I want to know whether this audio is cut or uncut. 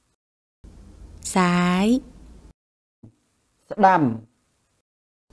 uncut